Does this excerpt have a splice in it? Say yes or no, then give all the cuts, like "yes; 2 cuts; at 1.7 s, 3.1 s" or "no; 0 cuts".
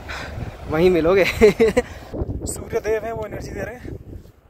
yes; 1 cut; at 2.0 s